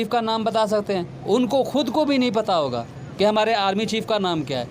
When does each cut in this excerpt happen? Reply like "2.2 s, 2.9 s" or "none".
3.5 s